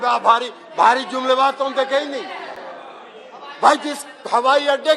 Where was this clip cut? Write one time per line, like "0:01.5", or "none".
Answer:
none